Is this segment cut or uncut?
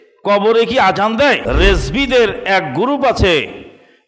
cut